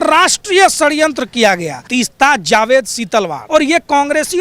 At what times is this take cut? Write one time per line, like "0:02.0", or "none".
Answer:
0:01.8
0:03.4

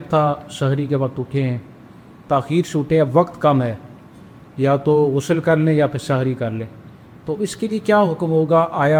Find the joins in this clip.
none

